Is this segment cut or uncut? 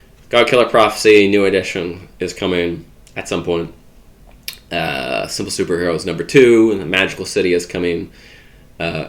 uncut